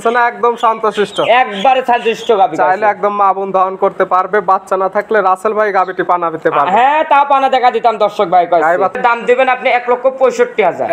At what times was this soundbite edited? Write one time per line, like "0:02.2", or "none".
0:09.0